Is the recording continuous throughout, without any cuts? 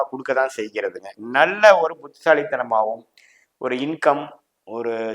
no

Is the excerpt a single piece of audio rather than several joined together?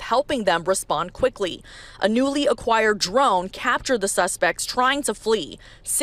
yes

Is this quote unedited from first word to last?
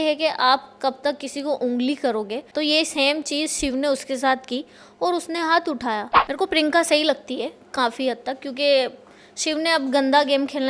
no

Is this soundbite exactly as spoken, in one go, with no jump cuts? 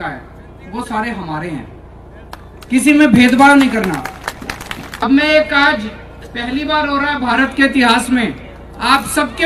no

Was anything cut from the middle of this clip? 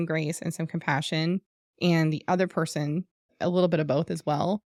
no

